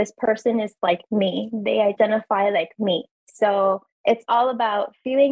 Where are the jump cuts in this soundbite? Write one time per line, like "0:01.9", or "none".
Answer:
0:01.9